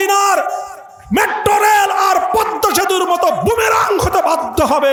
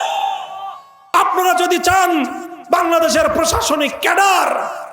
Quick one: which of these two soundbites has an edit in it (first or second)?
second